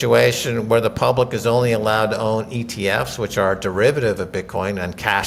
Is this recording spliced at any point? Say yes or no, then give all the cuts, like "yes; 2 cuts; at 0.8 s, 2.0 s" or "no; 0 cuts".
no; 0 cuts